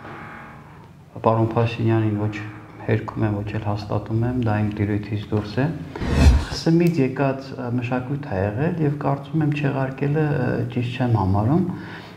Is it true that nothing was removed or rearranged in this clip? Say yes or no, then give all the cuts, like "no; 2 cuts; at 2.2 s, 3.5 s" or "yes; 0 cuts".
no; 1 cut; at 6.1 s